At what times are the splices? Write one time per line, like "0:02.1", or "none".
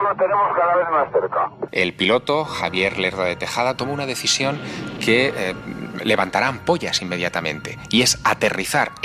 0:01.6